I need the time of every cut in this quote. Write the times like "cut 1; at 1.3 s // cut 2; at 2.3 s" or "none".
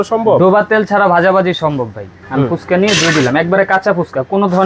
cut 1; at 2.1 s